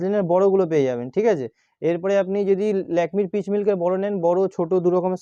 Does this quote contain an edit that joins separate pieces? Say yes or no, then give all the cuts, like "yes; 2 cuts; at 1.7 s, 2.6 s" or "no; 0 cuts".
no; 0 cuts